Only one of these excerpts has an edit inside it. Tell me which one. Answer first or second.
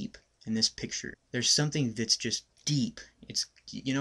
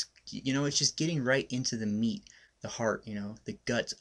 first